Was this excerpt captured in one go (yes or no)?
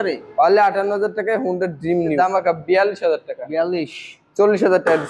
no